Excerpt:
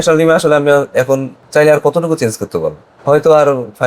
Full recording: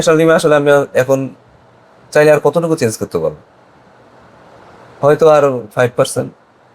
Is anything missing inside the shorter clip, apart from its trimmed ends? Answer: yes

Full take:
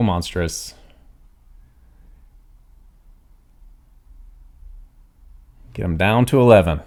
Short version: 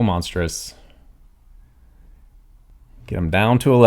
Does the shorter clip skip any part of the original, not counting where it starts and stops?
yes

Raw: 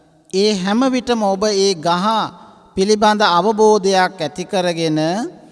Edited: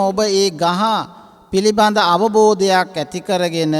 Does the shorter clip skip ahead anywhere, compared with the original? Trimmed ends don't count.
no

